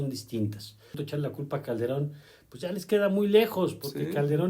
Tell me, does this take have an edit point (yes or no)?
yes